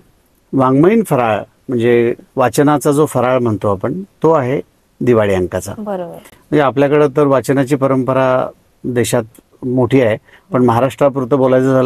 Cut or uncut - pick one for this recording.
uncut